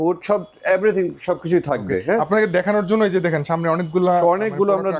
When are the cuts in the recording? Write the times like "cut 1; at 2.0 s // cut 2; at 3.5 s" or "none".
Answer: none